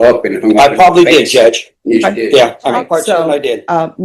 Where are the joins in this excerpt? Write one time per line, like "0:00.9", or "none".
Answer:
0:02.7